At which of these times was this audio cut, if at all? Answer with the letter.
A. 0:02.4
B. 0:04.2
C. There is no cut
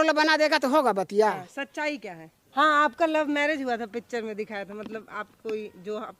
A